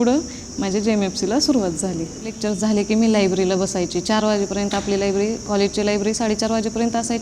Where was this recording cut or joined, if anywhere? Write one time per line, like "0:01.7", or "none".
0:02.4